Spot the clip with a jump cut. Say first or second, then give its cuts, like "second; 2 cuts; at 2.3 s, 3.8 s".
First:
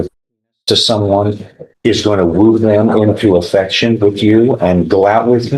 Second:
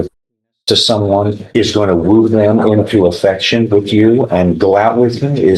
second; 1 cut; at 1.4 s